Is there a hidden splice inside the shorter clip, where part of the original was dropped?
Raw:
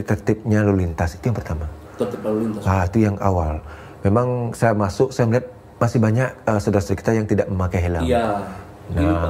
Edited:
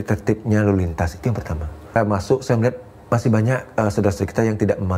yes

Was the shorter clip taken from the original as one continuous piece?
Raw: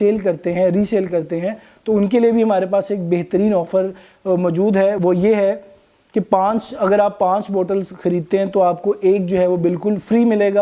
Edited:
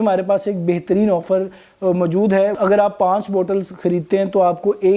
no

